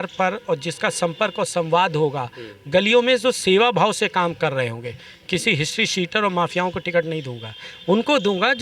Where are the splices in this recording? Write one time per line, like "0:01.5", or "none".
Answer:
none